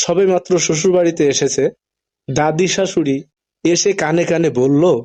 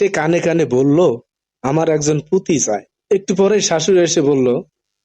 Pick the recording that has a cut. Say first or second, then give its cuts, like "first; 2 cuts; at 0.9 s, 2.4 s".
second; 1 cut; at 2.9 s